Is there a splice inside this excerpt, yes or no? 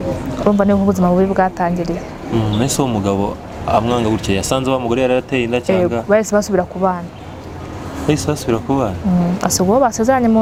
no